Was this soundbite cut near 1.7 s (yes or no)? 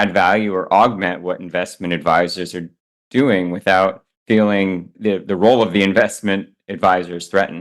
no